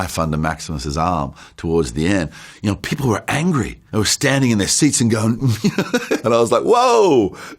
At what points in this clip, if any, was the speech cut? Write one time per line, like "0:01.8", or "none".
0:06.2